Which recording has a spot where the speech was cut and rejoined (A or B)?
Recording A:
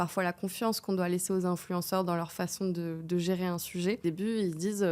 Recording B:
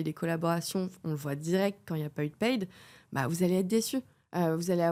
A